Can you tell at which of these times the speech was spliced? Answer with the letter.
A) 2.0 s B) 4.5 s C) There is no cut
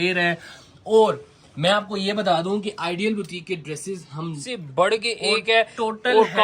B